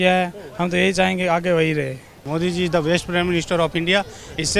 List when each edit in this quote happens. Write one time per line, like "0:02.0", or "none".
0:02.2